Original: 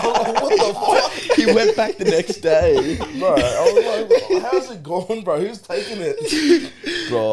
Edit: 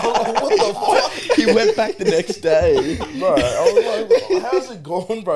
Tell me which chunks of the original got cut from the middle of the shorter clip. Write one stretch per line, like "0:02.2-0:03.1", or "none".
none